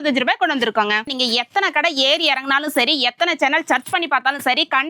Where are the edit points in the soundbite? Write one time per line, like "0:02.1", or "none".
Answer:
0:01.0